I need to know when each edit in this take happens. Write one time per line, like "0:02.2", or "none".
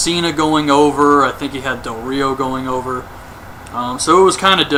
none